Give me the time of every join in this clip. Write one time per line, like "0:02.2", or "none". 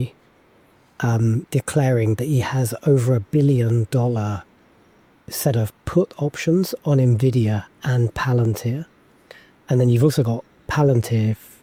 none